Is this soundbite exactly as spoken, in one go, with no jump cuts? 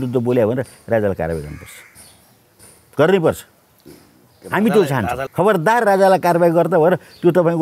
no; 1 cut; at 5.3 s

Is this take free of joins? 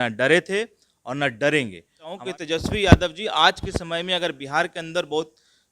no; 1 cut; at 2.2 s

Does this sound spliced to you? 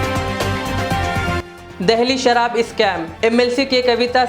no; 0 cuts

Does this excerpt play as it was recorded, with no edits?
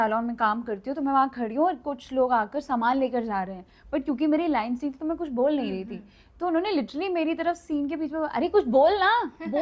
yes; 0 cuts

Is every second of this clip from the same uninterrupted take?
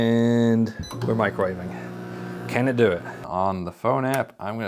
no; 1 cut; at 3.2 s

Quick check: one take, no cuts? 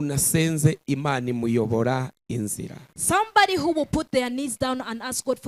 yes; 0 cuts

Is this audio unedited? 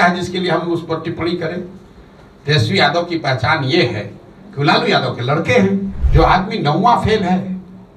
no; 1 cut; at 6.0 s

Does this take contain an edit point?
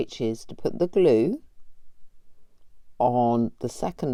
no; 0 cuts

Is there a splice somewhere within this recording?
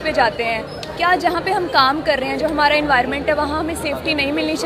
no; 0 cuts

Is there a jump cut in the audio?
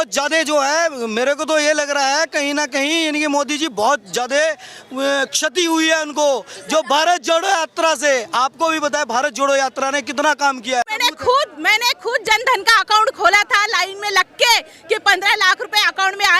yes; 1 cut; at 10.9 s

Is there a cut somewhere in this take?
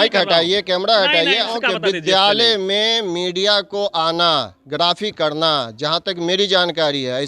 yes; 1 cut; at 1.5 s

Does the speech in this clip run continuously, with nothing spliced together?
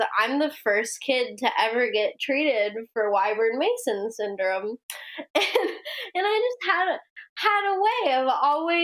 yes; 0 cuts

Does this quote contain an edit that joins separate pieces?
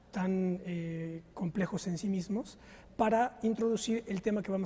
yes; 1 cut; at 1.4 s

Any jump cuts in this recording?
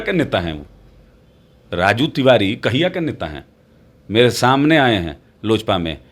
no; 0 cuts

